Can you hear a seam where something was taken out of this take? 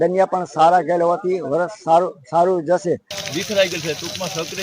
yes; 1 cut; at 3.1 s

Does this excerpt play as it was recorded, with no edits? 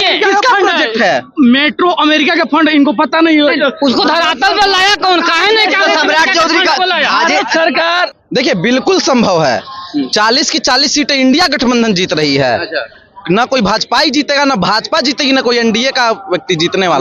no; 1 cut; at 8.1 s

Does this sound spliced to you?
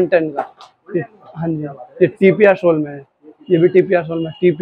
no; 0 cuts

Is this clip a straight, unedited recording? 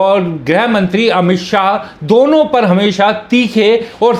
yes; 0 cuts

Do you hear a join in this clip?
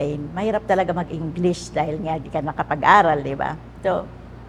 no; 0 cuts

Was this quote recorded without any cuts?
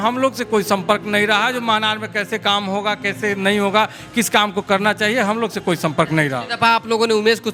yes; 0 cuts

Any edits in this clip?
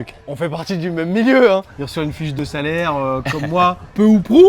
yes; 1 cut; at 2.0 s

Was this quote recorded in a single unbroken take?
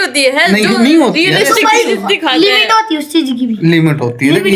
yes; 0 cuts

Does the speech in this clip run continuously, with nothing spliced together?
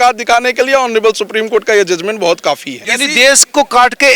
no; 1 cut; at 2.9 s

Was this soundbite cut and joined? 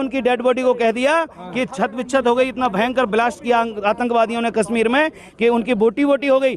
no; 0 cuts

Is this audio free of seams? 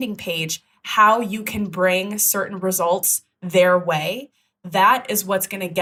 yes; 0 cuts

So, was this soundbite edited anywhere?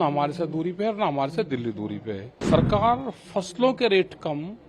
yes; 1 cut; at 2.3 s

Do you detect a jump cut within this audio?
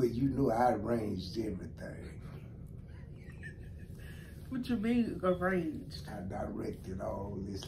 no; 0 cuts

